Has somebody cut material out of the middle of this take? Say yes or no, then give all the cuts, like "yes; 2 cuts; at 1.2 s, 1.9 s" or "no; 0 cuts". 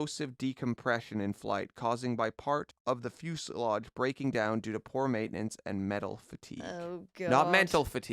yes; 1 cut; at 2.7 s